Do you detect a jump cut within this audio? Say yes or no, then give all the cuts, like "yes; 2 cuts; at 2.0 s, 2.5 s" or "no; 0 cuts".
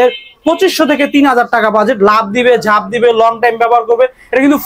no; 0 cuts